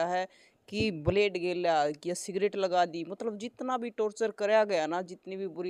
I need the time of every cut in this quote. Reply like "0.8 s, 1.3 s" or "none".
none